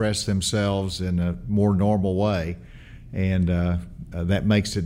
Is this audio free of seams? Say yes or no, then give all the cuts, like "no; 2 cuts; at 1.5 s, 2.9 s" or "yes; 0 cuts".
yes; 0 cuts